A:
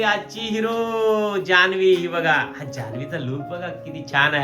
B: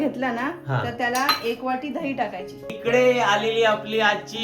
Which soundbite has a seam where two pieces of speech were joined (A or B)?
B